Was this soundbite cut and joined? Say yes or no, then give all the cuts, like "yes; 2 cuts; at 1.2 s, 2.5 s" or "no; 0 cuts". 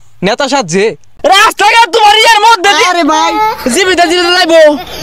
yes; 1 cut; at 1.0 s